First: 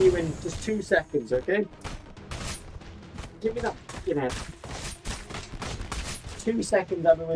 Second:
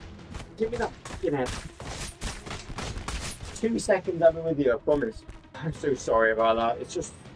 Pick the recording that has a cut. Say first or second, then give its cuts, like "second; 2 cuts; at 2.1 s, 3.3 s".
second; 1 cut; at 5.6 s